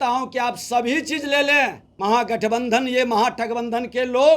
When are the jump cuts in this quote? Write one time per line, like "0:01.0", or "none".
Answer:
0:01.9